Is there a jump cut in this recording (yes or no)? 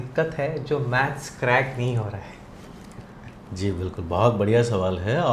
no